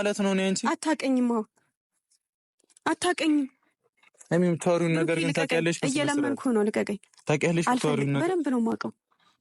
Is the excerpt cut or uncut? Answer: uncut